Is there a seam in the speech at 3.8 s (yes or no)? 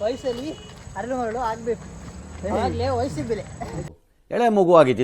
yes